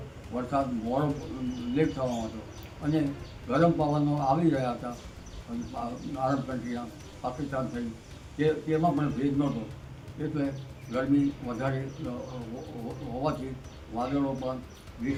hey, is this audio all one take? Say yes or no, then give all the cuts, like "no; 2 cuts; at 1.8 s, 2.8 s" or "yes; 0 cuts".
yes; 0 cuts